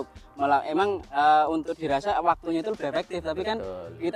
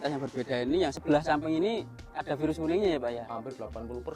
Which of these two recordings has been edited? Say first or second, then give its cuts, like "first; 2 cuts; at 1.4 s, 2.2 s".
second; 1 cut; at 1.0 s